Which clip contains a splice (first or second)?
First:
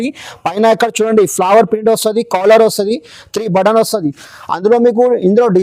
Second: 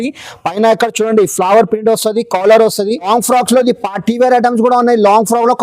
second